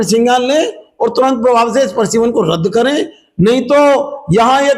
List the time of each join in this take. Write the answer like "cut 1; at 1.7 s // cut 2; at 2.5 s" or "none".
none